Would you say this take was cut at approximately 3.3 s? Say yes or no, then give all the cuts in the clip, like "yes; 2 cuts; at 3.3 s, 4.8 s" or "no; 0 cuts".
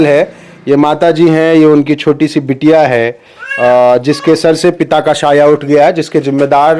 no; 0 cuts